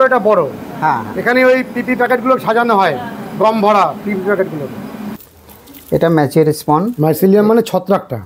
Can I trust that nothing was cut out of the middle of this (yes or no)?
no